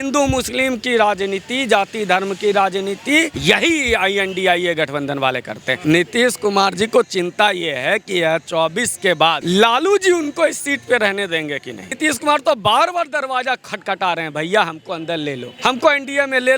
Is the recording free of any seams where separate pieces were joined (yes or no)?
no